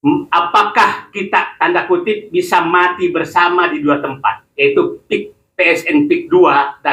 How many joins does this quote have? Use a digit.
0